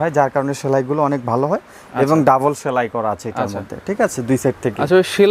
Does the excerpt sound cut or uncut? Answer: uncut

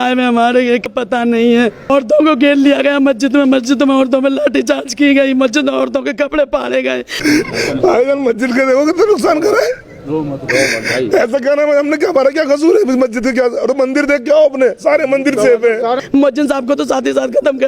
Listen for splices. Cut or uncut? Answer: cut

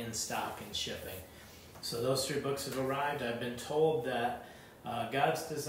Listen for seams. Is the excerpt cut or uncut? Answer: uncut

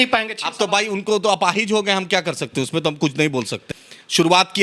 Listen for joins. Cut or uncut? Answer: cut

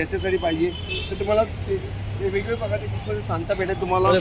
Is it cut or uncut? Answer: uncut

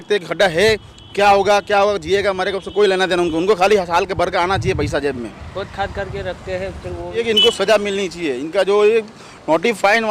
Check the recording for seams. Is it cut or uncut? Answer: uncut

